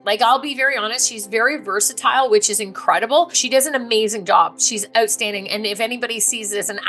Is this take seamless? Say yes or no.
no